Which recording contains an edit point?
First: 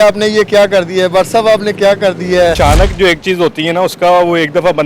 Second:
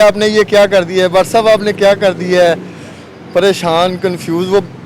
first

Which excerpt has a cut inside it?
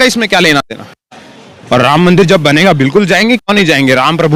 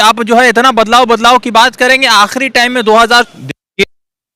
second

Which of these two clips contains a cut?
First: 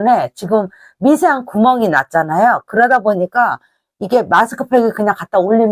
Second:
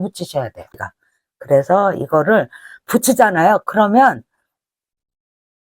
second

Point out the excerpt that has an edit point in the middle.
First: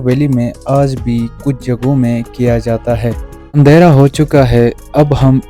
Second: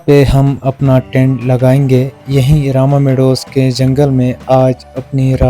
first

